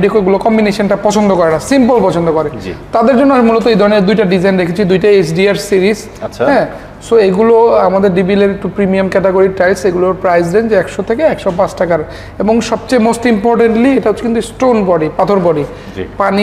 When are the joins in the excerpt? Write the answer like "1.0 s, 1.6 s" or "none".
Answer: none